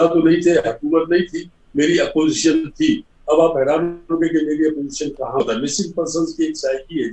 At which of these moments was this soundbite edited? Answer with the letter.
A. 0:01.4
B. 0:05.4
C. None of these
B